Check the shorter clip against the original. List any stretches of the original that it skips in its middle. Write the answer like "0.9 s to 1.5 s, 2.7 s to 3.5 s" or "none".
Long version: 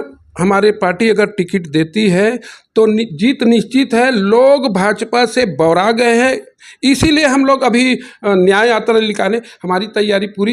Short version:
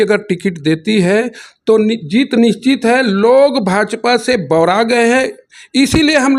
none